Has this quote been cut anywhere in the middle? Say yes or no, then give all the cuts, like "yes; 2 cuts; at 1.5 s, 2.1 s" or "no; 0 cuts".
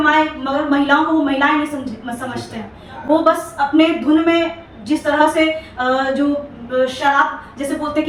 no; 0 cuts